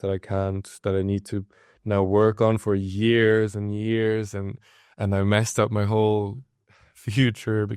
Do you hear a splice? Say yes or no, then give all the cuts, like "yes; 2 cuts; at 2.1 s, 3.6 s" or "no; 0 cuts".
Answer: no; 0 cuts